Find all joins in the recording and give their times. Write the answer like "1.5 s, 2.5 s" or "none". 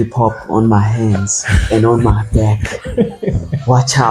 none

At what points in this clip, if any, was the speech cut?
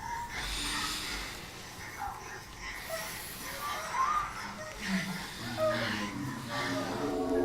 3.0 s

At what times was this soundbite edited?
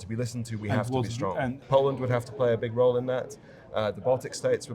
1.6 s

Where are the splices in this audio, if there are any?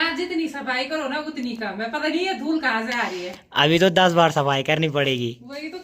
none

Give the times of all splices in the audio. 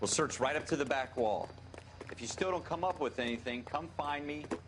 none

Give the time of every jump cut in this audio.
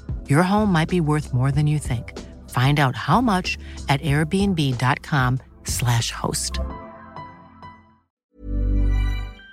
8.0 s

